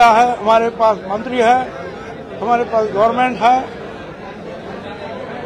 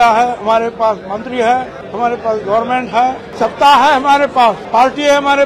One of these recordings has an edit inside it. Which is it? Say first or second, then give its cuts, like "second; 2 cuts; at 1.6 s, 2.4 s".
second; 3 cuts; at 1.8 s, 3.3 s, 4.6 s